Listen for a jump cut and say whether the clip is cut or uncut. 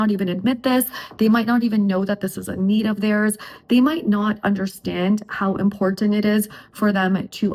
uncut